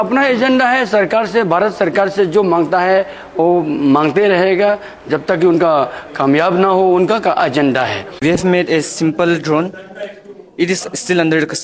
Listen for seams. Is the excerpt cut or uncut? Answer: cut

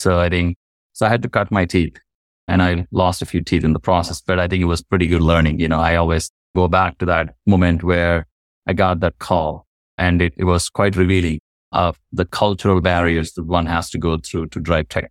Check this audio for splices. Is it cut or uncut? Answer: uncut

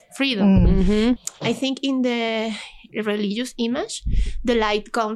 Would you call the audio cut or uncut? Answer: cut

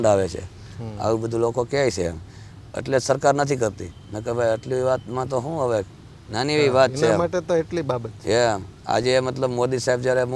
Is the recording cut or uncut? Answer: uncut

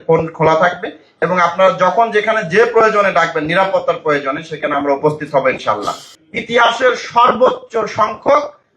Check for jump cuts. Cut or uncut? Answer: cut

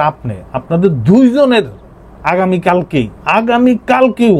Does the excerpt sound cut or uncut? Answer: cut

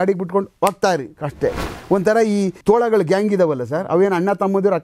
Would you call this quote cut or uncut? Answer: cut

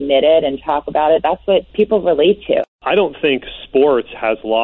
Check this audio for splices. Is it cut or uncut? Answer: cut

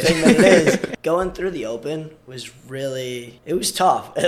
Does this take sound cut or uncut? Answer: cut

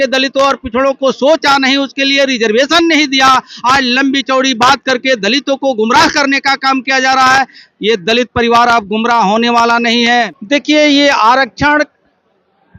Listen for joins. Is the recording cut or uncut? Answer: cut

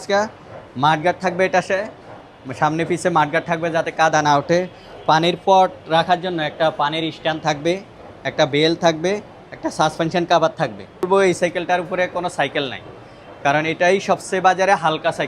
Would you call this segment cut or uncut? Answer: cut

